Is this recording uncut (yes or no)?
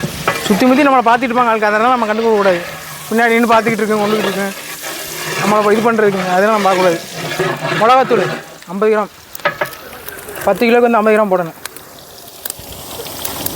no